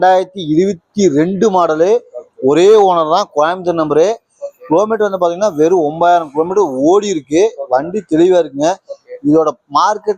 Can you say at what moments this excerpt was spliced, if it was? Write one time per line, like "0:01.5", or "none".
none